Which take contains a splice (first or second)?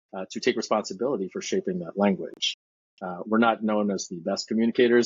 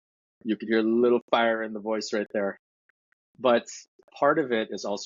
second